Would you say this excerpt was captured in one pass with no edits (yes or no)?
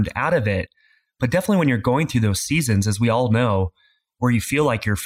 yes